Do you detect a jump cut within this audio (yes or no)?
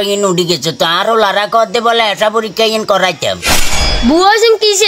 yes